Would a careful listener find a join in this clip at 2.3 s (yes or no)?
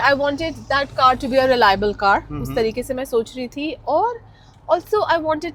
no